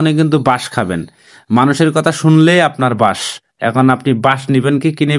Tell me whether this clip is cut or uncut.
uncut